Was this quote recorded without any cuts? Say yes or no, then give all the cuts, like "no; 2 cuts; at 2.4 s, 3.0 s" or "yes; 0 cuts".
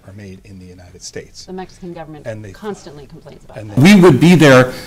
no; 1 cut; at 3.7 s